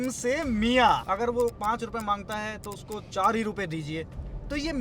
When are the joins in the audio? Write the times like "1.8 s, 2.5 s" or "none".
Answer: 1.0 s